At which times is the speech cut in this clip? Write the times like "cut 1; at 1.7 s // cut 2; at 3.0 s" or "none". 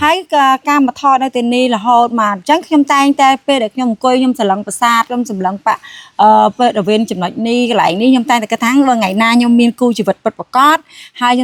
none